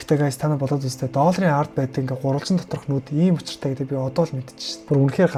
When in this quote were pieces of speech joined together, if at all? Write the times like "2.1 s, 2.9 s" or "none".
none